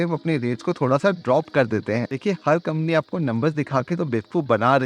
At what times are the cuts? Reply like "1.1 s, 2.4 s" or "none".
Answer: 2.1 s